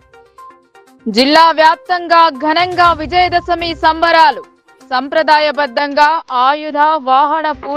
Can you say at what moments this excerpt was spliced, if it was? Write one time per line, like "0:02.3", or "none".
none